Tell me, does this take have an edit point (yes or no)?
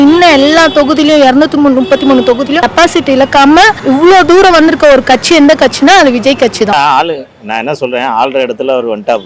yes